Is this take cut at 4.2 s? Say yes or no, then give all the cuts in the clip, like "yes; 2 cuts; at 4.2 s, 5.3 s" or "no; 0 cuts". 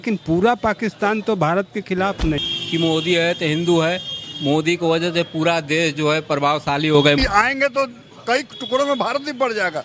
no; 2 cuts; at 2.4 s, 7.2 s